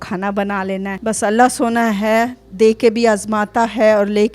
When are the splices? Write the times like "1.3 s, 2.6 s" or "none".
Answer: 1.0 s